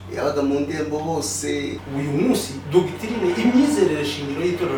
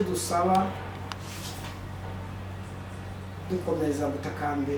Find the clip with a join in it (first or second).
first